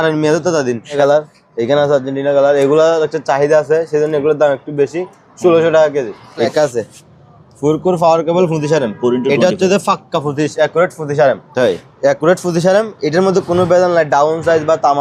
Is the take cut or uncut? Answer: cut